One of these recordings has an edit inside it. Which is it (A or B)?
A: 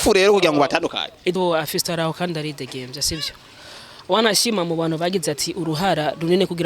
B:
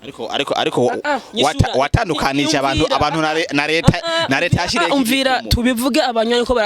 A